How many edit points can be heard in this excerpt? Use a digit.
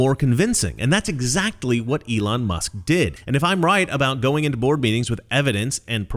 1